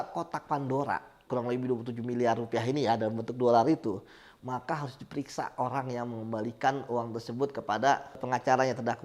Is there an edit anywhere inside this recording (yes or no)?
yes